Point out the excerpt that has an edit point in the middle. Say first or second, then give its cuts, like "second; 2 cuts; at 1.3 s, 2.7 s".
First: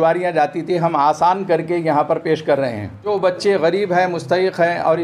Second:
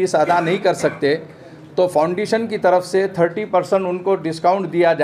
first; 1 cut; at 3.1 s